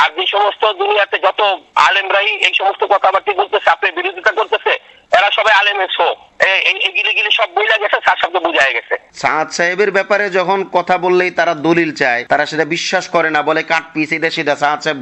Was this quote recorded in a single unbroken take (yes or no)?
no